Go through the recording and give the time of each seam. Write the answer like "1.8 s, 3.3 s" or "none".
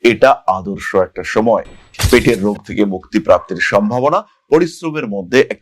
1.8 s